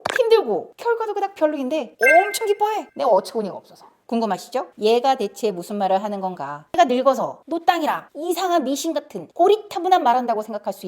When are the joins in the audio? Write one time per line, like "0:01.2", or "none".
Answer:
0:06.8